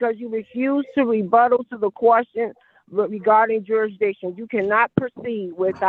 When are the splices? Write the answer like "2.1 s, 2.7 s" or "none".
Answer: none